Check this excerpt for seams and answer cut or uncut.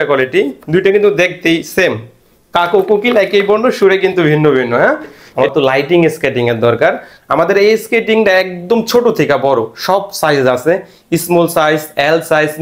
cut